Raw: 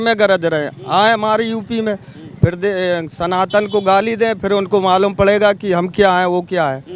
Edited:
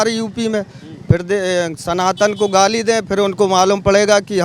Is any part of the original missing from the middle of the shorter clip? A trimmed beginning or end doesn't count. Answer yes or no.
no